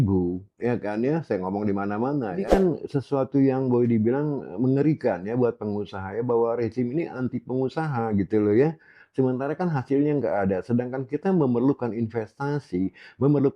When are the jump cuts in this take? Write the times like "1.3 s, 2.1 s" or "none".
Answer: 2.5 s